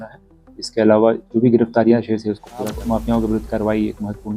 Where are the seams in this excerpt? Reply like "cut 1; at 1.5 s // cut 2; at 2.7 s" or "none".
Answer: cut 1; at 2.8 s